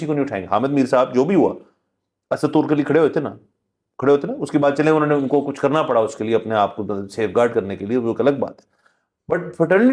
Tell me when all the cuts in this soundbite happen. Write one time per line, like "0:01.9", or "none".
none